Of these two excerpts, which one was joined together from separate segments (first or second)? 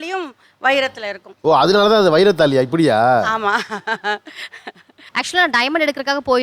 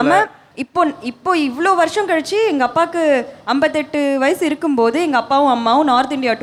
first